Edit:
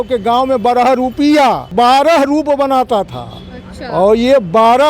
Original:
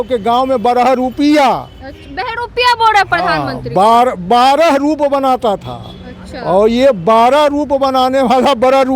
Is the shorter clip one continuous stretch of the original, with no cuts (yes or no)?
no